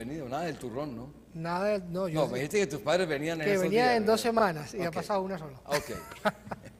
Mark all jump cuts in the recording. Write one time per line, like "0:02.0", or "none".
none